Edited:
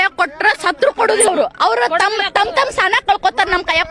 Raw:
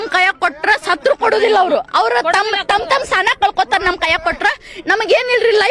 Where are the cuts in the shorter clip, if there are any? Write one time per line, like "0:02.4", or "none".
0:01.3